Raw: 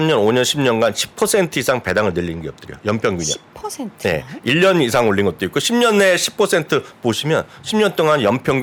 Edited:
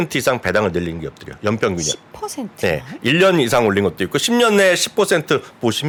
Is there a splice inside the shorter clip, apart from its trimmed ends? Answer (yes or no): no